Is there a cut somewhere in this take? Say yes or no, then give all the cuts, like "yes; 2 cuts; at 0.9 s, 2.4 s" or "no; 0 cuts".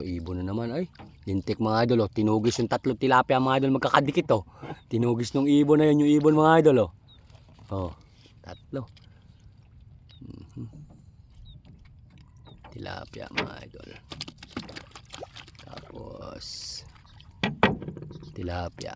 no; 0 cuts